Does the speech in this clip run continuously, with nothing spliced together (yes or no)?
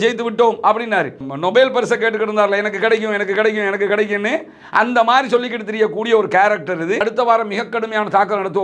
no